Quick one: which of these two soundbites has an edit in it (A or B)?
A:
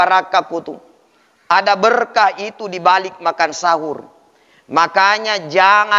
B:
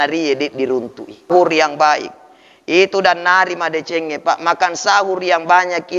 B